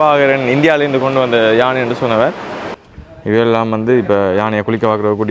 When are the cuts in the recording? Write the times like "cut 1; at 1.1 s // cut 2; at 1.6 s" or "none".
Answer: cut 1; at 2.7 s